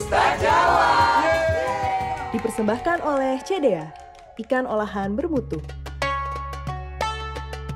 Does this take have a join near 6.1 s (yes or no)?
yes